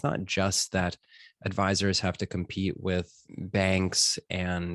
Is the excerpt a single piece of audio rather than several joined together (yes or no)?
no